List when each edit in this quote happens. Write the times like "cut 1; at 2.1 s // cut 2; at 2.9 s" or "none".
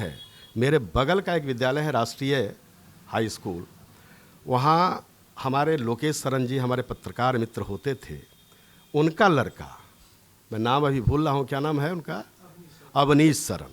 none